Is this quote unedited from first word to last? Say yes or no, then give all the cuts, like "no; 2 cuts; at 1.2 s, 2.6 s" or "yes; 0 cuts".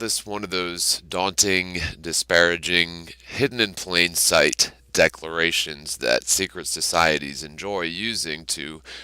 no; 1 cut; at 4.2 s